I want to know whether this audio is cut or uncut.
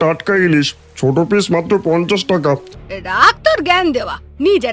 cut